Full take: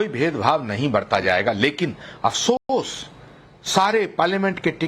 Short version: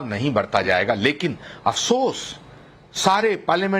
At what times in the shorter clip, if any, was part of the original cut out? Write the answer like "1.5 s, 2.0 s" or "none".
2.0 s